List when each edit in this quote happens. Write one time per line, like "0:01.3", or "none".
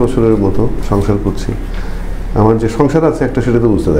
none